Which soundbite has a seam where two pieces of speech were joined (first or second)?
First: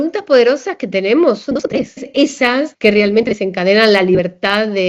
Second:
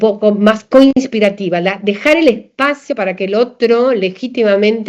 first